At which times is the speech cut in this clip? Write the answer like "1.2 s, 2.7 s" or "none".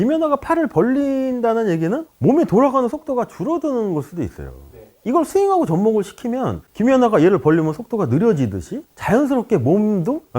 6.6 s